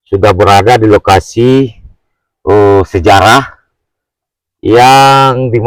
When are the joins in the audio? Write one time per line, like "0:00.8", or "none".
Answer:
none